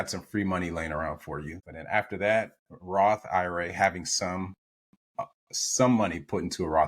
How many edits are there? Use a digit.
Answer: 1